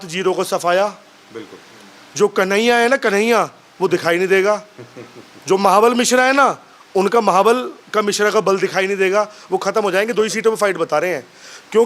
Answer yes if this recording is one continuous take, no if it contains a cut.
yes